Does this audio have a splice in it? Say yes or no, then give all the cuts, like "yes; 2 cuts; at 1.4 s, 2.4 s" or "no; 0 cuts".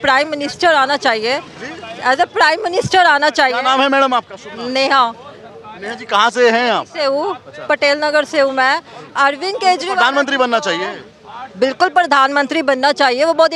no; 0 cuts